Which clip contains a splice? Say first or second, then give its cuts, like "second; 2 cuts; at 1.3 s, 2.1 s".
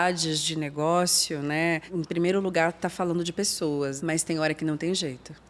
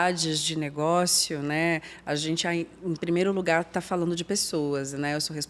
first; 2 cuts; at 1.9 s, 4.0 s